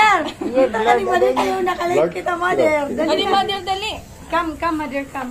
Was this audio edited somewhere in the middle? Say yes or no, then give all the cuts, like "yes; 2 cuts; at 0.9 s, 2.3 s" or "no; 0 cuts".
no; 0 cuts